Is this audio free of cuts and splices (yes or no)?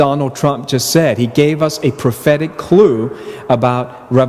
yes